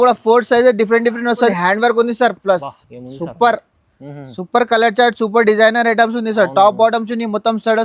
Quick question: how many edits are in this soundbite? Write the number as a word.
one